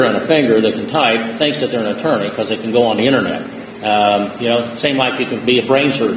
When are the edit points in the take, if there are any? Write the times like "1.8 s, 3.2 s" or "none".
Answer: none